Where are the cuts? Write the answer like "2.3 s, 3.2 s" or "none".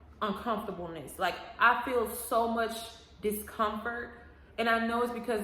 none